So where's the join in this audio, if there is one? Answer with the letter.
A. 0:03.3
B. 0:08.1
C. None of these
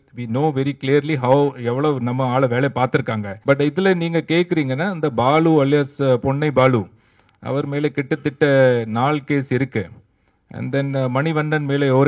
A